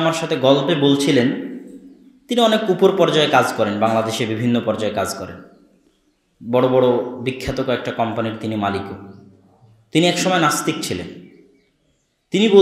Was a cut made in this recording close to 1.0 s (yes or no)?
no